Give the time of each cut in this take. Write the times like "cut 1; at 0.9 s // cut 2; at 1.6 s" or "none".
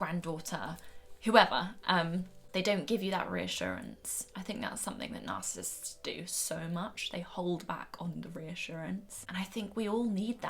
cut 1; at 2.4 s // cut 2; at 9.2 s